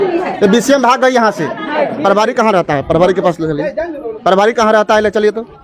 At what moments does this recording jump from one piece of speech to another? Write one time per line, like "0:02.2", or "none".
none